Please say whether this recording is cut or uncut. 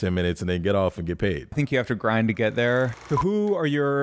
cut